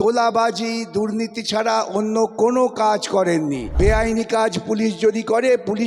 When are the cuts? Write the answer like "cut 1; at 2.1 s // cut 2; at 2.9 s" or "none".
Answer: cut 1; at 3.7 s